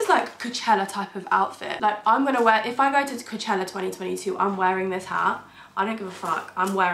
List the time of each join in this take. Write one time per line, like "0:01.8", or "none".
none